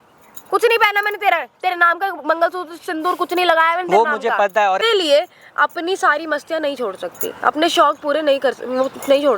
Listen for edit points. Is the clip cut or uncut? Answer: cut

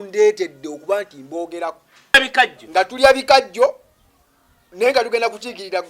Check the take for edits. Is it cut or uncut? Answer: cut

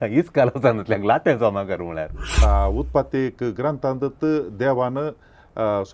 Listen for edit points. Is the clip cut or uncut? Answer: cut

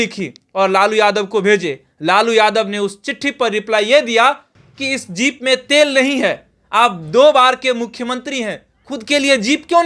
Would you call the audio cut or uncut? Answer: uncut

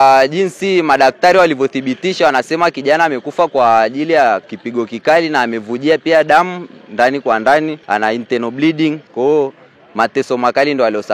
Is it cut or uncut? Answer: cut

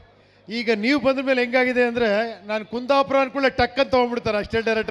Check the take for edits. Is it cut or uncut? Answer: uncut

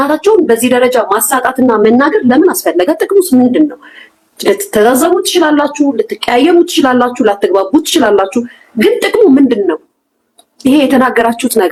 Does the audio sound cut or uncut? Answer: uncut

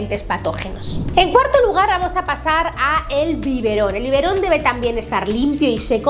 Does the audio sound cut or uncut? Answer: uncut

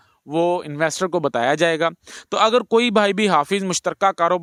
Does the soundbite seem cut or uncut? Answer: uncut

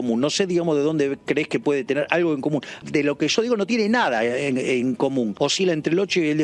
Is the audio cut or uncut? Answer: cut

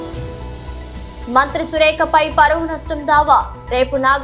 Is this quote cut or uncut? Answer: uncut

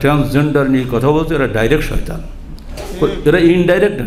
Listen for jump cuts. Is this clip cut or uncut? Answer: uncut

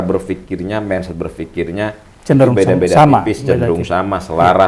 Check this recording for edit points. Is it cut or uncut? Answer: uncut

